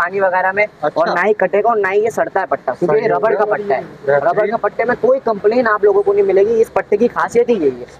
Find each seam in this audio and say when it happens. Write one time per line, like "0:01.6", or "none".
none